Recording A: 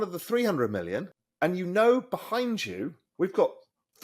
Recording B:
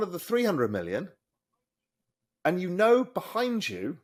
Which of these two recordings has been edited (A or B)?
A